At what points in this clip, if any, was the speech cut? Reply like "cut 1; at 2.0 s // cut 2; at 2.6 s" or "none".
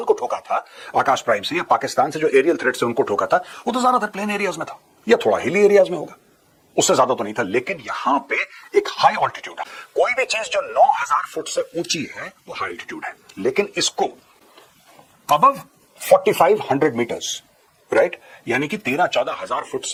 none